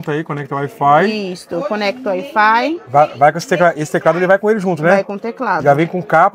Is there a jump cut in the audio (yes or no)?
no